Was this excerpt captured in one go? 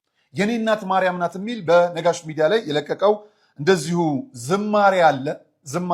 yes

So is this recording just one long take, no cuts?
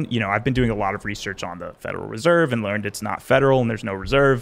yes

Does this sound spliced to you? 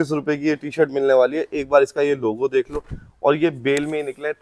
no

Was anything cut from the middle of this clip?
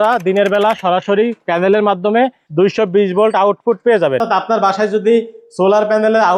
yes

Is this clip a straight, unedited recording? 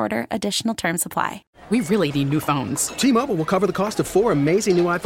no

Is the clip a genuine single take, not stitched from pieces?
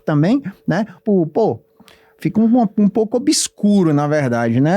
no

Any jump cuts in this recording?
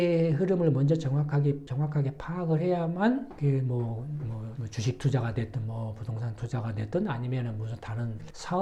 no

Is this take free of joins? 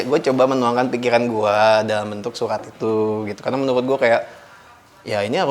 yes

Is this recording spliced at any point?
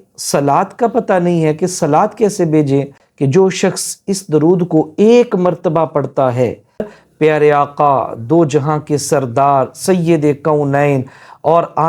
yes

